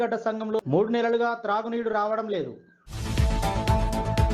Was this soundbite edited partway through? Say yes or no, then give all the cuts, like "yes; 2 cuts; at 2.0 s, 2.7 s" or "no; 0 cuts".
no; 0 cuts